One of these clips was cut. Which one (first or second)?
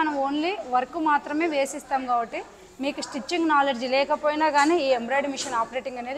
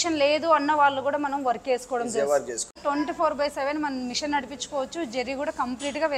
second